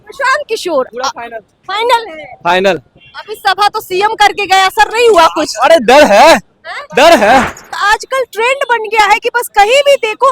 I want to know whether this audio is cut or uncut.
cut